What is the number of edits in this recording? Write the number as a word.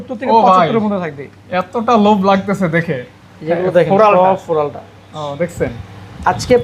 zero